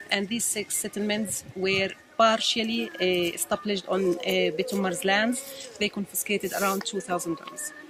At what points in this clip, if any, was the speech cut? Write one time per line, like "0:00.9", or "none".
0:04.2